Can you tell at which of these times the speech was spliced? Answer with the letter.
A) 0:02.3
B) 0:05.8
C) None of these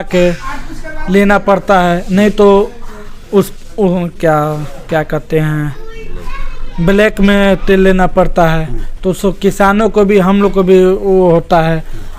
C